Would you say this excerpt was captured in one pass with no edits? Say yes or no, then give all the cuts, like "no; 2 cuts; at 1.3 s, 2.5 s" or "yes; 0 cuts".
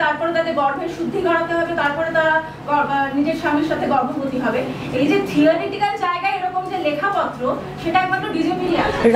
yes; 0 cuts